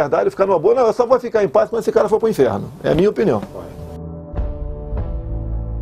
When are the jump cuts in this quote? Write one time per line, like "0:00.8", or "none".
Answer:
none